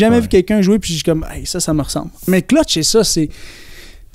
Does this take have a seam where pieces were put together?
yes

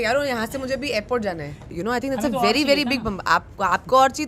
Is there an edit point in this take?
yes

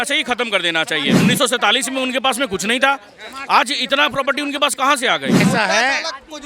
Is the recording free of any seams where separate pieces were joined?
no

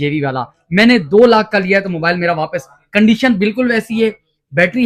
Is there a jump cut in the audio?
no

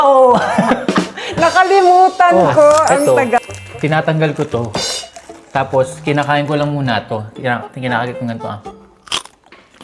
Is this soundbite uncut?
no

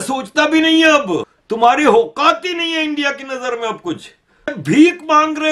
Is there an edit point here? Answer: yes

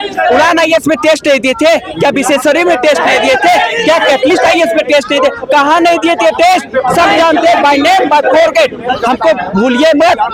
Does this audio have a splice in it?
no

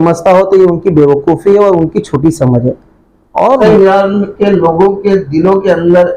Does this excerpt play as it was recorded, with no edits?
no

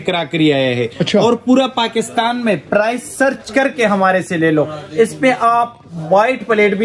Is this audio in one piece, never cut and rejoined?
yes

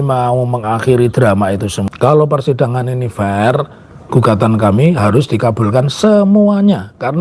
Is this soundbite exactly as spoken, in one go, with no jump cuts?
no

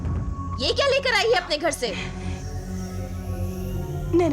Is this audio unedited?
yes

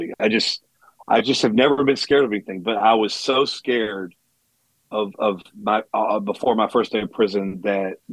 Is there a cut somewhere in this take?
no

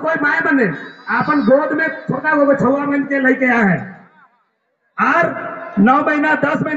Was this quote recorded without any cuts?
yes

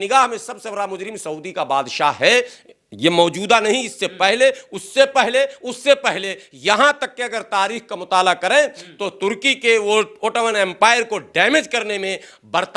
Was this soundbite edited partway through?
no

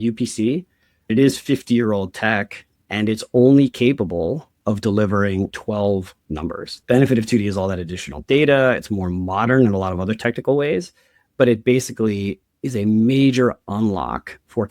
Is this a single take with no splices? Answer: no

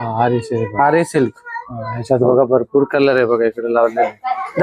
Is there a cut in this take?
no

